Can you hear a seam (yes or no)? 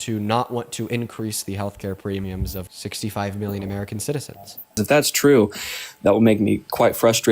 yes